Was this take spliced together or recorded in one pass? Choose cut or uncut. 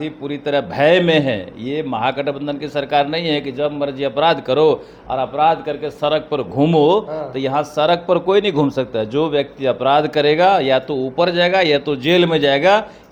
uncut